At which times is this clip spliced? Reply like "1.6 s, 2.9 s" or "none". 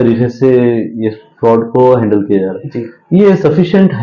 none